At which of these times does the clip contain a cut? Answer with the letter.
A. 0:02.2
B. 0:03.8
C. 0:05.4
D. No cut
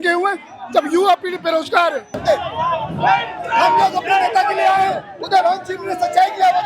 A